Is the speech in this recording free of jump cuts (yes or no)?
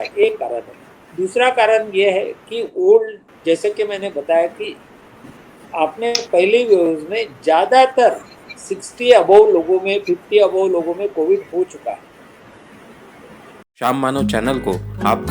no